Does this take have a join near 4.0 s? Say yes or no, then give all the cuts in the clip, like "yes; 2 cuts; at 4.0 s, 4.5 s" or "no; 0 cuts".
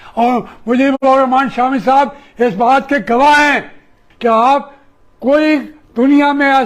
yes; 1 cut; at 4.0 s